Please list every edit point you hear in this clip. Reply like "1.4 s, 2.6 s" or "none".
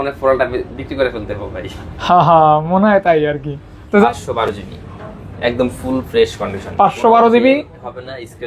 4.0 s